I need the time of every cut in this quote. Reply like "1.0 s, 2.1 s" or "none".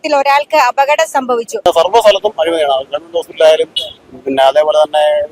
1.5 s